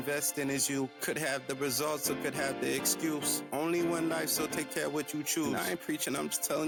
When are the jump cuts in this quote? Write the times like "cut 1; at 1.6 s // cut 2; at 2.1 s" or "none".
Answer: none

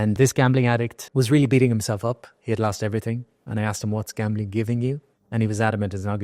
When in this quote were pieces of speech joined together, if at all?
cut 1; at 1.0 s

